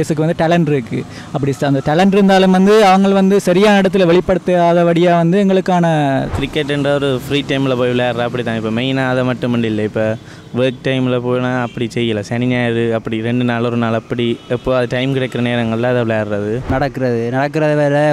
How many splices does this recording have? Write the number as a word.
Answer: two